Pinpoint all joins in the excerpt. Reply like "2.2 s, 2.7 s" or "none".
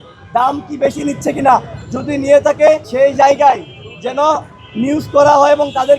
2.9 s